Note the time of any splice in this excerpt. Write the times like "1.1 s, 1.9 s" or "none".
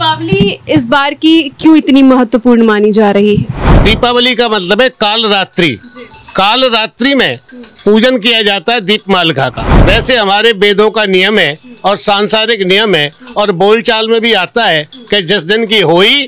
3.7 s, 9.7 s